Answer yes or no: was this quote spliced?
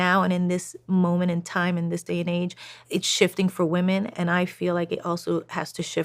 yes